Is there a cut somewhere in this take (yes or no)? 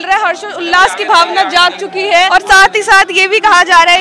yes